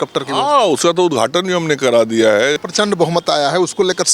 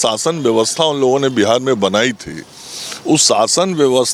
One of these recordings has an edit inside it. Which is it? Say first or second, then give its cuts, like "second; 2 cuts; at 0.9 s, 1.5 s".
first; 1 cut; at 2.6 s